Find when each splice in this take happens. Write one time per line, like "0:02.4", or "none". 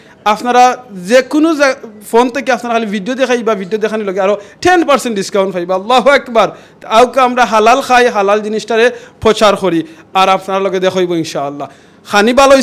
none

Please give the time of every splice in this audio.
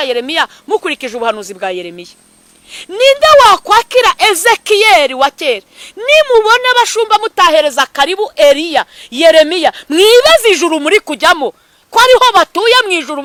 none

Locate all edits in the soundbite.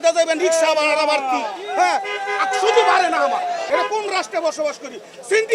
0:03.7

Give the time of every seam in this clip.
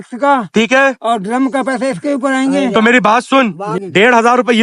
0:03.7

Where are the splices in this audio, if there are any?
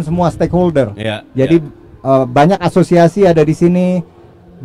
none

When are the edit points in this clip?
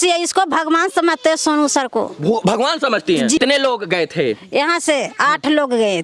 0:03.4

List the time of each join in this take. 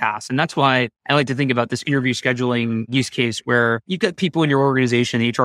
0:01.0
0:02.9
0:03.9

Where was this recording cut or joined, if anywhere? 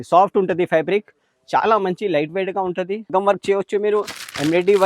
0:03.1

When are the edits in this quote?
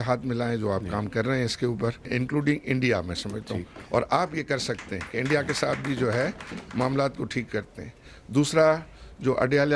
0:02.1

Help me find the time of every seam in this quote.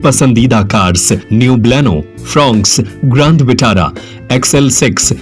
0:01.2

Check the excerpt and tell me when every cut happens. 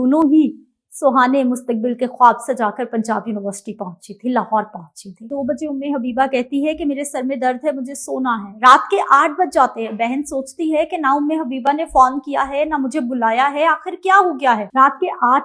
0:05.3

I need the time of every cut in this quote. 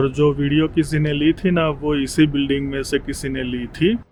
none

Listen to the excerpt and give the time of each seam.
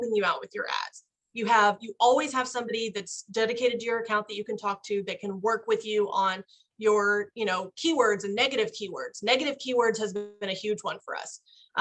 none

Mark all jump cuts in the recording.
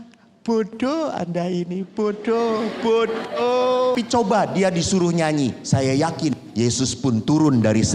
0:03.9

